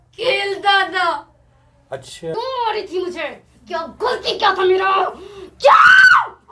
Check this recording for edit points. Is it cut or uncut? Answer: cut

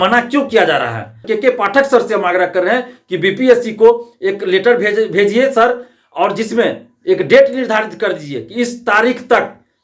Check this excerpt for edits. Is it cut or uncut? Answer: cut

